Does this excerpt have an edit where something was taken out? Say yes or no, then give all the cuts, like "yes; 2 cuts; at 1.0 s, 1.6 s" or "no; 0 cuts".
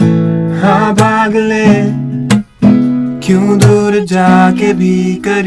no; 0 cuts